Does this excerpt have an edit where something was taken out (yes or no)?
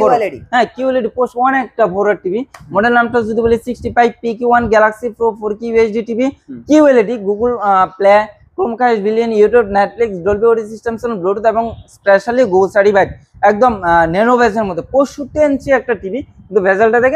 no